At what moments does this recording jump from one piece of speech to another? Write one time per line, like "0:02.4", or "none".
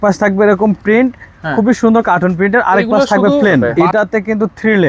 0:03.7